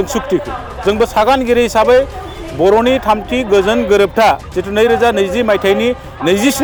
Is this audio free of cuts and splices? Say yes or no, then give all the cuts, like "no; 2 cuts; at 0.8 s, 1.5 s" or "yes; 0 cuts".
yes; 0 cuts